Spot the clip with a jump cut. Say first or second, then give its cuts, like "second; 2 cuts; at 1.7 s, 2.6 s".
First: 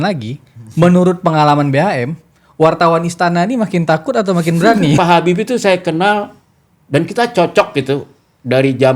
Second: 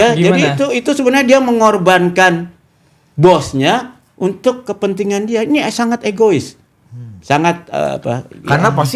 first; 1 cut; at 5.0 s